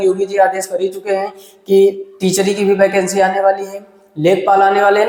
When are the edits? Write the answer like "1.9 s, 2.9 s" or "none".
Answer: none